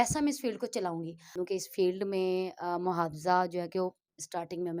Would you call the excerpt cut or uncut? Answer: cut